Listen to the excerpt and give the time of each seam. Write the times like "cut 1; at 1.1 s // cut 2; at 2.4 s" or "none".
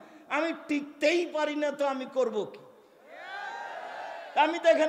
none